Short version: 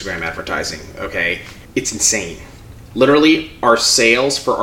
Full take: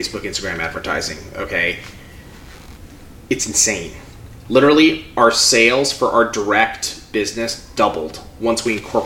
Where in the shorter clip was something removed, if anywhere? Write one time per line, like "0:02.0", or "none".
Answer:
0:01.5